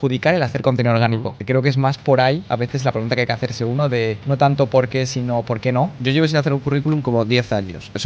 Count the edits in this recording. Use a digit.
3